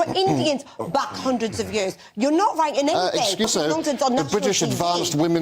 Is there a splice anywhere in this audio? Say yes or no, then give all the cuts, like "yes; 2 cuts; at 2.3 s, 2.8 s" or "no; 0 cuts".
yes; 1 cut; at 3.5 s